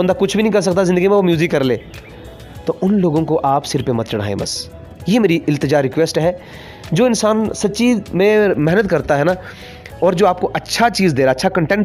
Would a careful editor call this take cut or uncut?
uncut